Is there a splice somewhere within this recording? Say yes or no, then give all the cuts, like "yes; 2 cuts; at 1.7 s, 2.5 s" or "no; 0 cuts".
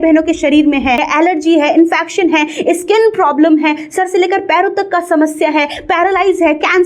yes; 1 cut; at 1.1 s